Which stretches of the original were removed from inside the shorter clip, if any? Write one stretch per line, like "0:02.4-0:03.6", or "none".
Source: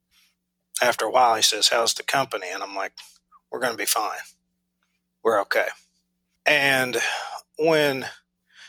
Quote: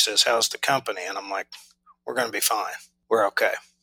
0:04.3-0:05.0